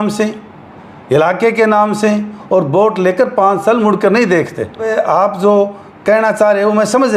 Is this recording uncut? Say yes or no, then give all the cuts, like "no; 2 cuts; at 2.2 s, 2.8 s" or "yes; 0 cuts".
no; 1 cut; at 4.9 s